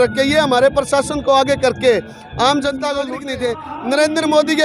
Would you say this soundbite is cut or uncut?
cut